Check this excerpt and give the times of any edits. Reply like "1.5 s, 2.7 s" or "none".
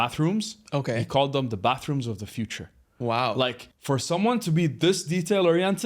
3.7 s